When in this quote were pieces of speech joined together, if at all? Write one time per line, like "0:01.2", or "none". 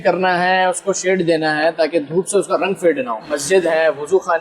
0:03.3